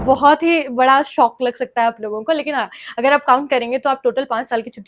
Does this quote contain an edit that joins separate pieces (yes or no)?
no